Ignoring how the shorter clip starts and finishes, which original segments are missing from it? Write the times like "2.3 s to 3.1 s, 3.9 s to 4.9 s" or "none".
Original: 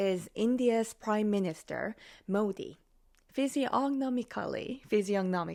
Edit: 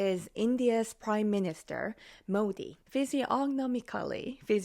2.7 s to 3.2 s

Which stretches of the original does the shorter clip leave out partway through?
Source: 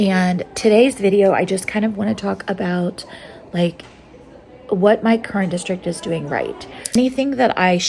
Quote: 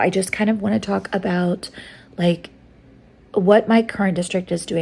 none

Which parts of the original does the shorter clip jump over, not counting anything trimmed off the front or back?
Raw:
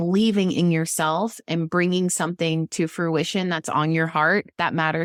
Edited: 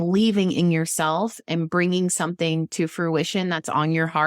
none

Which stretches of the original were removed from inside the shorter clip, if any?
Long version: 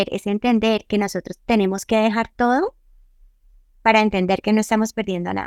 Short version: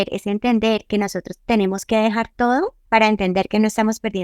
2.8 s to 3.7 s

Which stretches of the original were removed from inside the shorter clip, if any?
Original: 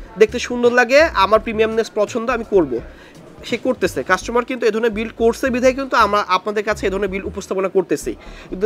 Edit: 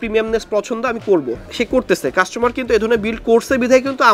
2.8 s to 3.3 s

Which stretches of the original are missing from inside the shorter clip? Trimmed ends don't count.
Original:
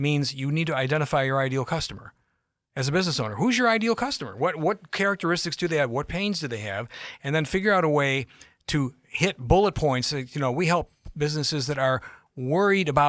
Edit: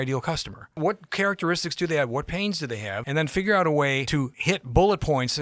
2.2 s to 4.6 s, 6.8 s to 7.1 s, 8.5 s to 9.0 s

